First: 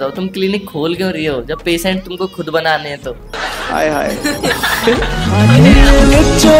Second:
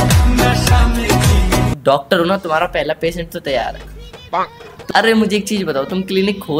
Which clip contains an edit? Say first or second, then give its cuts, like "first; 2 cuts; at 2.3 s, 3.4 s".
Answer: second; 1 cut; at 1.8 s